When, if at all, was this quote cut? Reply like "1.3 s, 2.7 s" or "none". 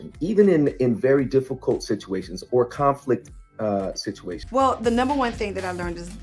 4.4 s